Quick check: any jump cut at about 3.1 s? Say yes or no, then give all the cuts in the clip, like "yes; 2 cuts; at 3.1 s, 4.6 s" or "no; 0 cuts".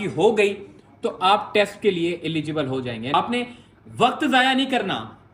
yes; 1 cut; at 3.1 s